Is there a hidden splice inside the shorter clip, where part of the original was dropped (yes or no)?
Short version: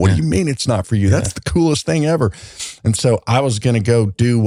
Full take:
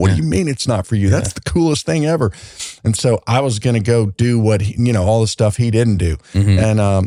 no